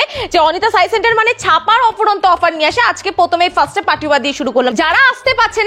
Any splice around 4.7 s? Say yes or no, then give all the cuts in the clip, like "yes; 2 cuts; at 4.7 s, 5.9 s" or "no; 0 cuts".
yes; 1 cut; at 4.7 s